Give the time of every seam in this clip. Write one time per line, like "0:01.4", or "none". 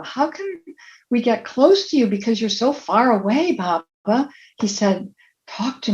none